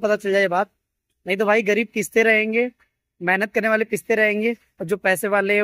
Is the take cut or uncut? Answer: uncut